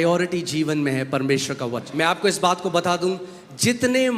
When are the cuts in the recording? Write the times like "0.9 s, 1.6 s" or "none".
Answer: 1.9 s

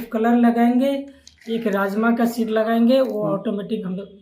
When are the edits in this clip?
none

